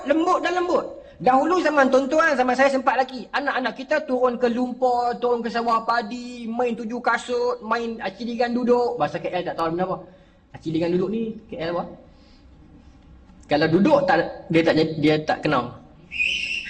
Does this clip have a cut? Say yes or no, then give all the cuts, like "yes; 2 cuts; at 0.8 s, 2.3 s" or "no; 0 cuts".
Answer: no; 0 cuts